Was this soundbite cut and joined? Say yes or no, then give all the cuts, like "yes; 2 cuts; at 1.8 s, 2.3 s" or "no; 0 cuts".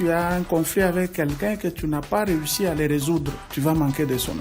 yes; 1 cut; at 3.5 s